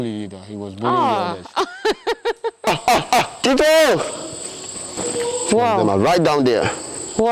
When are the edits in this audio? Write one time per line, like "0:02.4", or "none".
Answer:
0:02.7
0:03.3
0:04.9

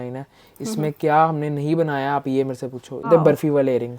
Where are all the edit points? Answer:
0:03.1

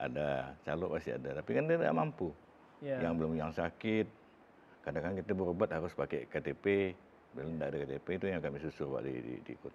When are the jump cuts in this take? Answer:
none

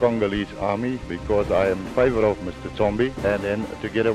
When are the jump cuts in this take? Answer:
0:01.1
0:03.2

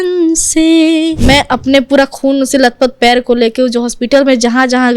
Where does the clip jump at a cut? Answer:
0:01.2

